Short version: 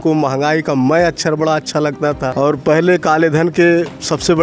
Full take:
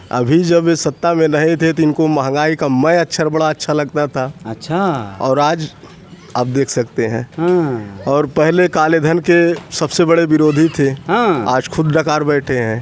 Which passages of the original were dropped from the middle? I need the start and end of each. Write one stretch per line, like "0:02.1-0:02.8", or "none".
0:04.2-0:08.0